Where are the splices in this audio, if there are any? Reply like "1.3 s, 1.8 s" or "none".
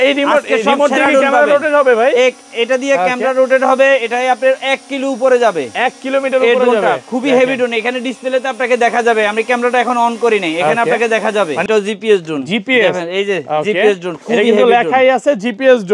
11.6 s